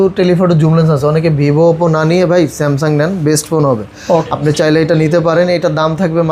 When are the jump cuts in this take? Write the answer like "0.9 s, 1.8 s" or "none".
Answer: 4.2 s